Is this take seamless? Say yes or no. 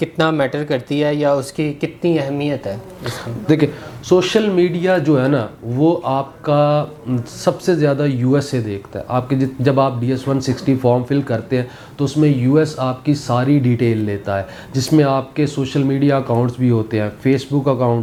yes